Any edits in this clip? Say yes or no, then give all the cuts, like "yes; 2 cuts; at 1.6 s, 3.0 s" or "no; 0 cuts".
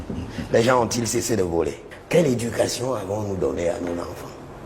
yes; 1 cut; at 1.9 s